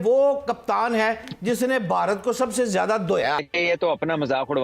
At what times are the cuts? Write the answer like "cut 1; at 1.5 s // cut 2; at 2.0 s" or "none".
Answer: cut 1; at 3.4 s